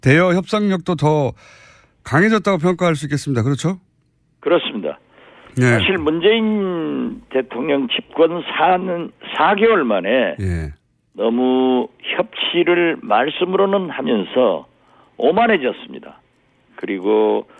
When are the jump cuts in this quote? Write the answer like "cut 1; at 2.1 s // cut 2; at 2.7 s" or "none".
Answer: cut 1; at 5.8 s